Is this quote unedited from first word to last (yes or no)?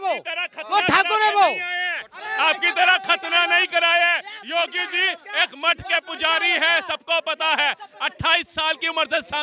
yes